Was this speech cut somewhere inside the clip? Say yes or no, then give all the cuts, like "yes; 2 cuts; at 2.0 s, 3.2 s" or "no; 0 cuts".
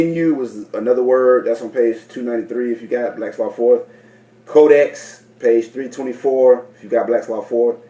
no; 0 cuts